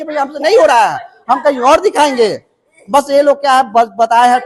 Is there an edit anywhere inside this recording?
no; 0 cuts

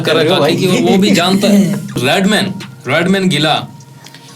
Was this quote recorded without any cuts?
no; 1 cut; at 2.0 s

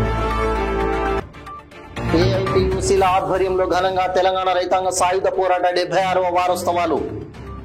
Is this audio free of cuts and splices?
no; 1 cut; at 1.0 s

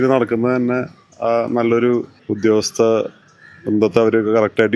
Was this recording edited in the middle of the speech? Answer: no; 0 cuts

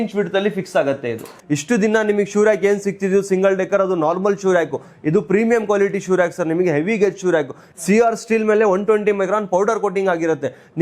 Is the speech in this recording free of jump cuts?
yes; 0 cuts

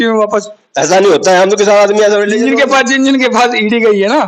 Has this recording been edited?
no; 0 cuts

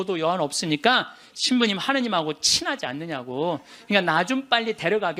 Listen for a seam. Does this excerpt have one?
no; 0 cuts

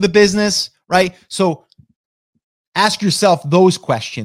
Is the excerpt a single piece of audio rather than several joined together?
yes; 0 cuts

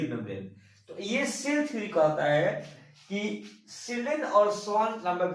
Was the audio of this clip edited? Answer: no; 0 cuts

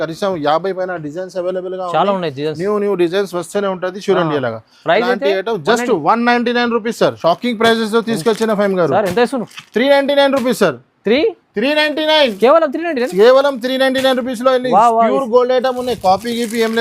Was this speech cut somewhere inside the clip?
yes; 1 cut; at 7.1 s

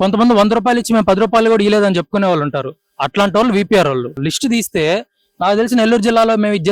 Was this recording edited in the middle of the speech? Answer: yes; 1 cut; at 4.2 s

